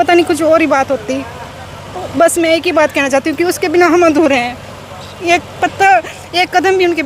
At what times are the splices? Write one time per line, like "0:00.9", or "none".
none